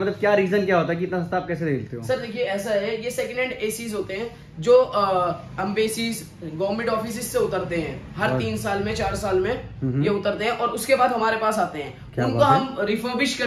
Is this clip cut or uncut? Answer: uncut